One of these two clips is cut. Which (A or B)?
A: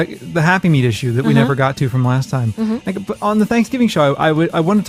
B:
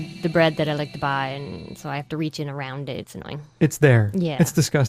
A